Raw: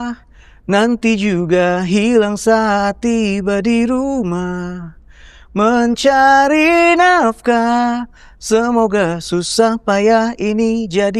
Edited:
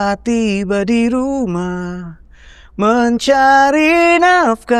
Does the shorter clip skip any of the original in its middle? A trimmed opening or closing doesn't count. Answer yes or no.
no